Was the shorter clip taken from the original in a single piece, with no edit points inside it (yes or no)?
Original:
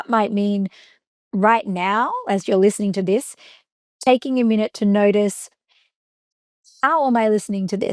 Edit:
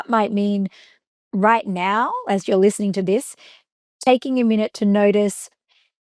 yes